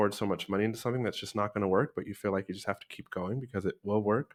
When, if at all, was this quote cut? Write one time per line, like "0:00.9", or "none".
none